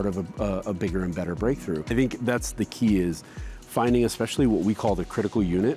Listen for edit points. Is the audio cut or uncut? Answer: cut